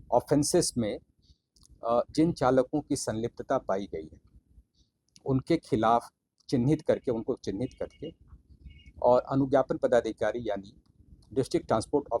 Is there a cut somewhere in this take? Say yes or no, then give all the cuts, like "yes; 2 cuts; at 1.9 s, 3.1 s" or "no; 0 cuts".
no; 0 cuts